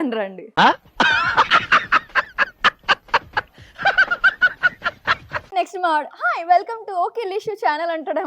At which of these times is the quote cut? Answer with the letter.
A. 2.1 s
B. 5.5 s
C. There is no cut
B